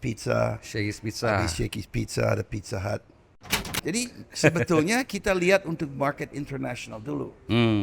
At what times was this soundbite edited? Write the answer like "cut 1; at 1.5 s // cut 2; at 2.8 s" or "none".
cut 1; at 3.6 s

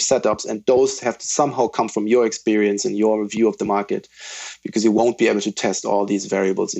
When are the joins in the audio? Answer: none

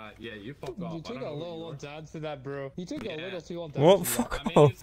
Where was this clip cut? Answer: cut 1; at 2.7 s

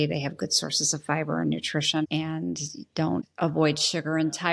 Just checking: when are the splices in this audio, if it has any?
cut 1; at 2.0 s // cut 2; at 3.3 s

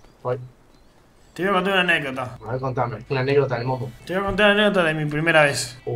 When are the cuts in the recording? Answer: none

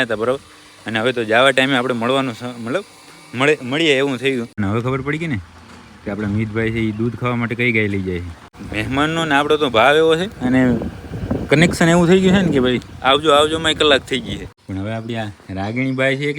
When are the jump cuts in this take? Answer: cut 1; at 4.6 s // cut 2; at 8.6 s // cut 3; at 14.5 s

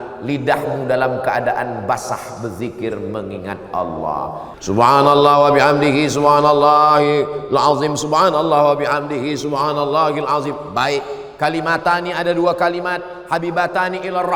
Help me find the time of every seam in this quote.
cut 1; at 4.5 s

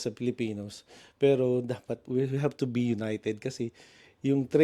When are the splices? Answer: cut 1; at 2.0 s

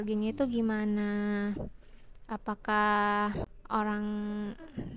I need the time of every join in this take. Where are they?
cut 1; at 3.4 s

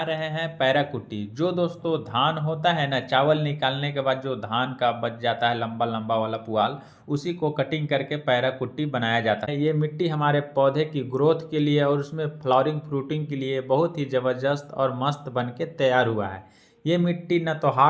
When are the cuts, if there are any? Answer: cut 1; at 9.5 s

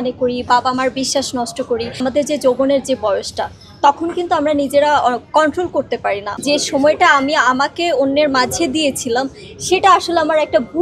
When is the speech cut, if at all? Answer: cut 1; at 2.0 s // cut 2; at 6.3 s

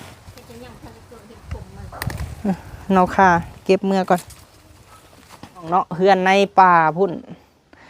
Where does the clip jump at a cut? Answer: cut 1; at 5.7 s

